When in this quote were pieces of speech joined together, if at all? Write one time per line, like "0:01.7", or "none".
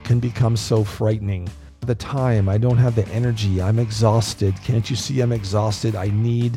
0:01.8